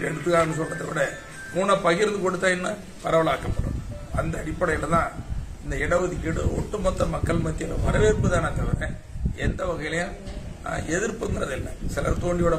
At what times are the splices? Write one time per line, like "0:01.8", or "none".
none